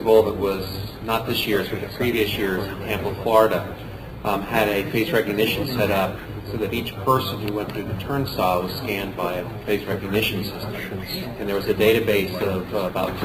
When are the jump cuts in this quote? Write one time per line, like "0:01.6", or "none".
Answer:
0:08.8